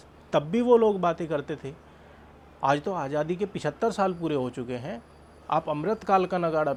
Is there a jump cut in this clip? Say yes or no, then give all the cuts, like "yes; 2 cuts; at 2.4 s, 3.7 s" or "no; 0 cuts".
no; 0 cuts